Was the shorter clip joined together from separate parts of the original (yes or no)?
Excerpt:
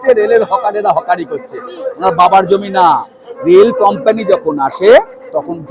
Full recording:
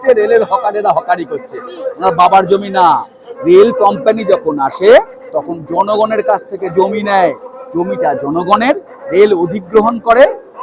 no